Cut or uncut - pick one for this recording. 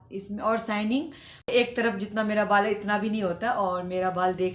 cut